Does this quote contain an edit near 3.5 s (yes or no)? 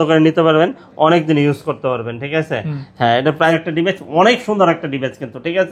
yes